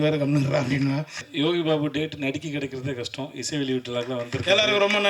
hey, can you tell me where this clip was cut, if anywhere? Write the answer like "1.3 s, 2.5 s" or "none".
1.2 s